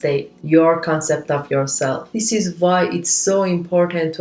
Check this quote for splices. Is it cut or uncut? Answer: cut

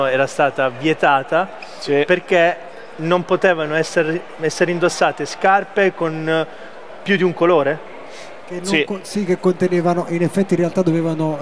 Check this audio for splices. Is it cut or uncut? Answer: uncut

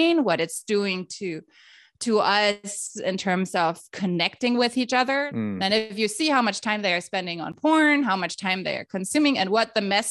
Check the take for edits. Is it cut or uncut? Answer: cut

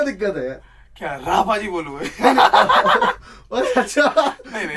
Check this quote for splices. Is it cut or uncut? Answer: uncut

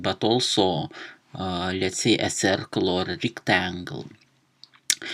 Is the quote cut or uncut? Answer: uncut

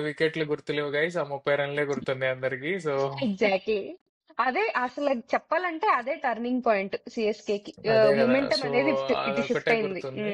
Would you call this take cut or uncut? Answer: uncut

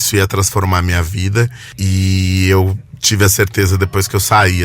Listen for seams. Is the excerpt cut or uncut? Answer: cut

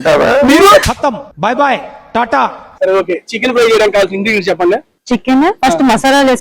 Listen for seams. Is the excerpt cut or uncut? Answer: cut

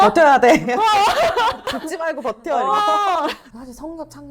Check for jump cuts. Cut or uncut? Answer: cut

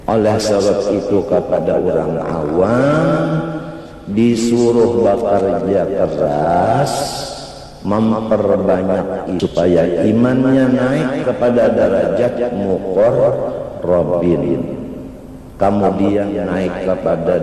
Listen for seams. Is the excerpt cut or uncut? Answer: cut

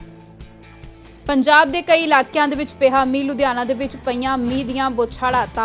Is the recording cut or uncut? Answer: cut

